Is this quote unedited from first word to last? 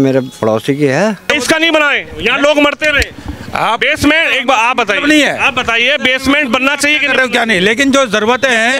no; 1 cut; at 1.3 s

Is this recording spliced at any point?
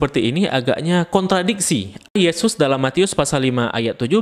yes; 1 cut; at 2.1 s

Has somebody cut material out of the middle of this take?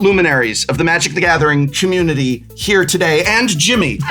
no; 0 cuts

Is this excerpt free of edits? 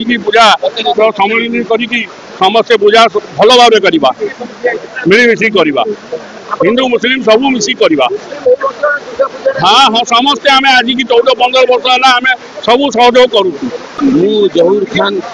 no; 1 cut; at 13.8 s

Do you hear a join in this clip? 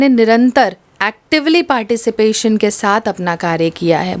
no; 0 cuts

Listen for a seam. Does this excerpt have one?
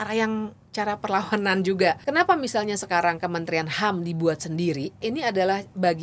yes; 2 cuts; at 2.0 s, 5.0 s

